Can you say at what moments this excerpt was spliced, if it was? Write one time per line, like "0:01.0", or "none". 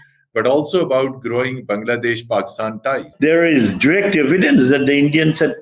0:03.1